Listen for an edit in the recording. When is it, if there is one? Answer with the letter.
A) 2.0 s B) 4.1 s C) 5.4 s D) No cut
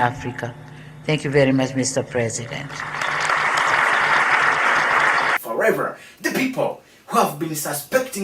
C